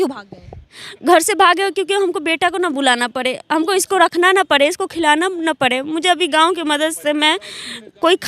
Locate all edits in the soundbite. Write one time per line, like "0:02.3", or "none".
none